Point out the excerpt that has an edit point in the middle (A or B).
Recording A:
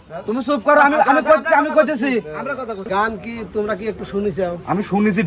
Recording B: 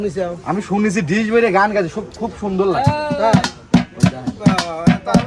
A